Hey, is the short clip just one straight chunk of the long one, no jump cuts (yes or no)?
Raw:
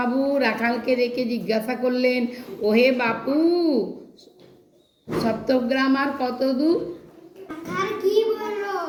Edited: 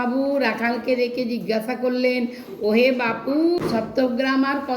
no